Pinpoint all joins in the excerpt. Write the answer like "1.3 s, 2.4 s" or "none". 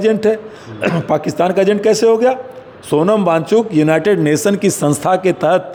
none